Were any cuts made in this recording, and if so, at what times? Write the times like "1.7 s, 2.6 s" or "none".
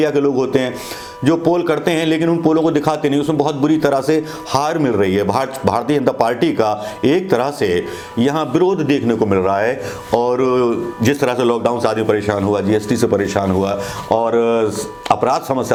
none